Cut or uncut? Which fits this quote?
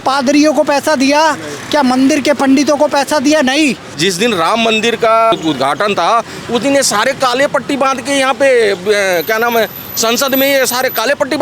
cut